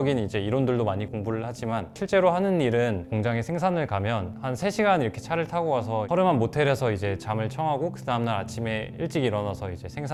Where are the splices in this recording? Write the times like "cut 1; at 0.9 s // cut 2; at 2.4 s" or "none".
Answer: none